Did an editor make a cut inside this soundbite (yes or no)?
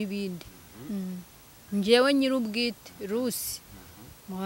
yes